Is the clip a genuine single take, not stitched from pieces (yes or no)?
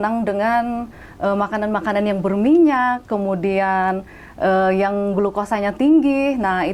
yes